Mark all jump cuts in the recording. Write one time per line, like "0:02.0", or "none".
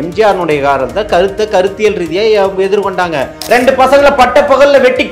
0:03.4